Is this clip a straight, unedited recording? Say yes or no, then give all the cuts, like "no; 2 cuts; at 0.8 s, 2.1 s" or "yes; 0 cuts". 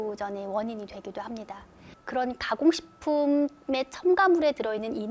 no; 1 cut; at 1.8 s